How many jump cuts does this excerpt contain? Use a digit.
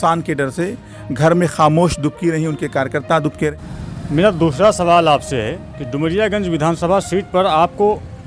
1